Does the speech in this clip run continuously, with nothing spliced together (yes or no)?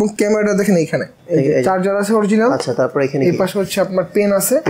no